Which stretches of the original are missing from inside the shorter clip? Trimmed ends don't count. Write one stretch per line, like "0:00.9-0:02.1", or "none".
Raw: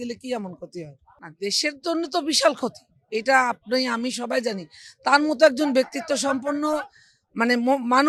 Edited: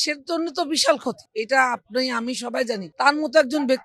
0:02.8-0:03.0
0:04.6-0:04.9